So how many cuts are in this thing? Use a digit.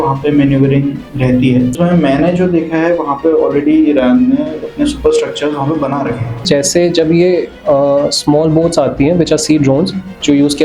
2